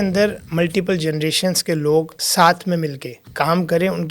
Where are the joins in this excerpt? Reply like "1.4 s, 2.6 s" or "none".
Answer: 2.2 s, 3.2 s